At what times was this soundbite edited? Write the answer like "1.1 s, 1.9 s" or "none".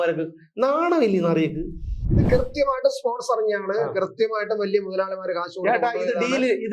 2.1 s